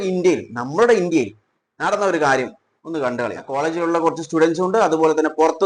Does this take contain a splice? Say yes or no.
yes